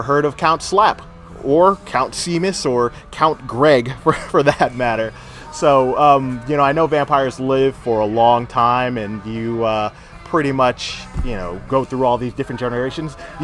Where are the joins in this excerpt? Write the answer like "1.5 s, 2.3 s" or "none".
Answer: none